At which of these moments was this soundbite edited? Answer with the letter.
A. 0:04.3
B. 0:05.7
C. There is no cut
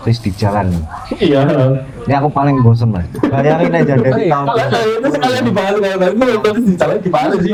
C